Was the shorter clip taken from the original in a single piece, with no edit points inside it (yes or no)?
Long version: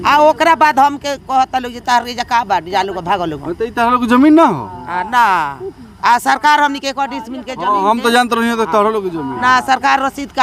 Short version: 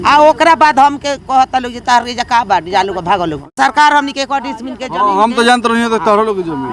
no